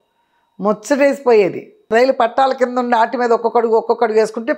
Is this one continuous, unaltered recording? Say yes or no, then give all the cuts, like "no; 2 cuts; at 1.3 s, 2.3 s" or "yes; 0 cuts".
no; 1 cut; at 1.7 s